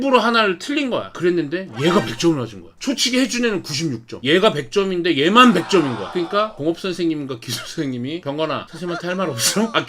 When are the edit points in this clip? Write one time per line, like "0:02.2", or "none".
0:01.1
0:04.2
0:08.2